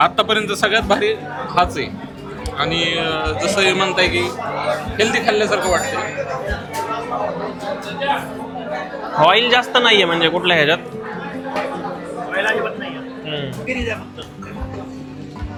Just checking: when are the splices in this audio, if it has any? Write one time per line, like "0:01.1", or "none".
none